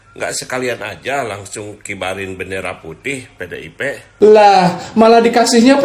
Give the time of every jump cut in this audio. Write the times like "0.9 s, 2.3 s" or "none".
4.0 s